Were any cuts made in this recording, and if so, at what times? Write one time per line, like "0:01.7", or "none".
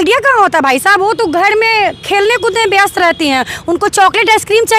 none